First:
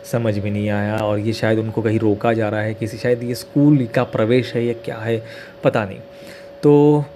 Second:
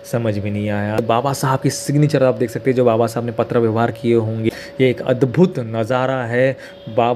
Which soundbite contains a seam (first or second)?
second